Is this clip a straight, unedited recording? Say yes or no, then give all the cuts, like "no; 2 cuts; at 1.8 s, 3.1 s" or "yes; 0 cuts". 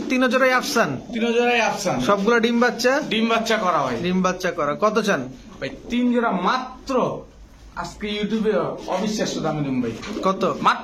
yes; 0 cuts